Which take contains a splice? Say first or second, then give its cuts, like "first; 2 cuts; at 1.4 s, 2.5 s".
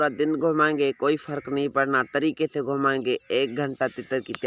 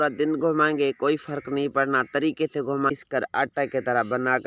second; 1 cut; at 2.9 s